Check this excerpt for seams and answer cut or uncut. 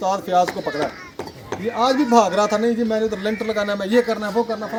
uncut